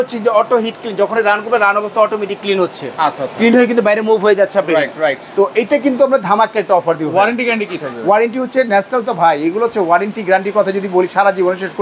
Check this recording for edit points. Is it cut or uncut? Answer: uncut